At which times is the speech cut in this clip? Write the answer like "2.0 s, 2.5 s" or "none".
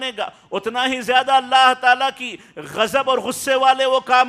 none